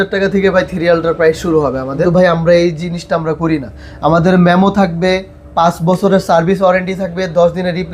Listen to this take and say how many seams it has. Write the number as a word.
one